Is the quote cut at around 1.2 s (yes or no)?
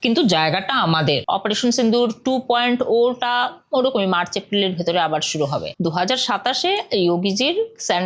yes